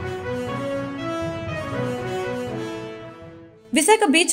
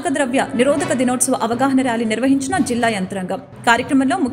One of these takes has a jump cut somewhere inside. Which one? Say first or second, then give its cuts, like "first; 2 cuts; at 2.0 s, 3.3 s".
first; 1 cut; at 1.8 s